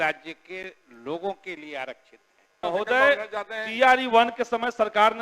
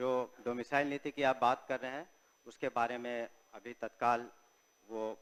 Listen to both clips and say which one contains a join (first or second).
first